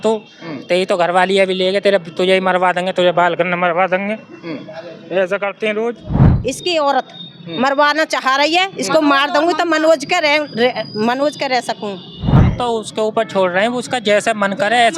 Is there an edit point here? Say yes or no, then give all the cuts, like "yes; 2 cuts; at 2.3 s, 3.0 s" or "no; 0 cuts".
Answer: yes; 2 cuts; at 6.3 s, 12.3 s